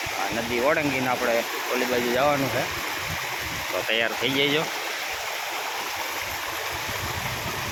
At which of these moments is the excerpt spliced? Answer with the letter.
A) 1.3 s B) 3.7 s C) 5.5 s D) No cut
D